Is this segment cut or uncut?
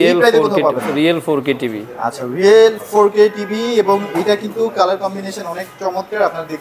uncut